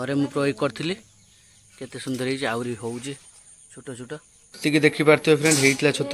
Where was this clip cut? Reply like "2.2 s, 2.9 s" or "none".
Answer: 4.6 s